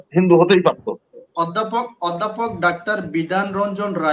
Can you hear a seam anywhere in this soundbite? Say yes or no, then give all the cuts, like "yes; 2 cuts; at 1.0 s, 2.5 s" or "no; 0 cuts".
yes; 1 cut; at 1.3 s